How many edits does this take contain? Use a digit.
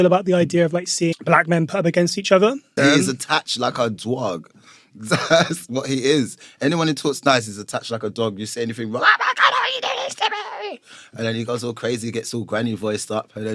2